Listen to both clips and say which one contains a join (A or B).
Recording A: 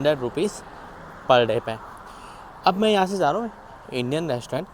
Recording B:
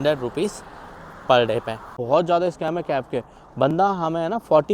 B